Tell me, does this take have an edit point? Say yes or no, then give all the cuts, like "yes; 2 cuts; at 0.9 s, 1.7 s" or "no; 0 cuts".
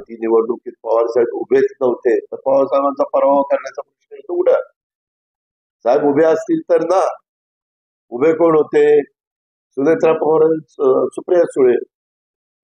no; 0 cuts